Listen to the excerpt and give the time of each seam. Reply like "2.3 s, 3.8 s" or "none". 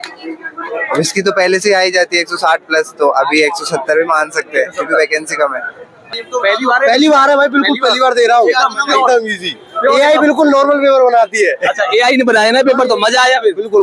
6.0 s